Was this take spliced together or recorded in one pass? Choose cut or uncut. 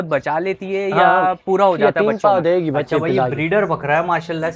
cut